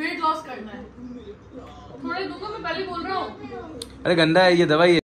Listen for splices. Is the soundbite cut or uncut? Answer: uncut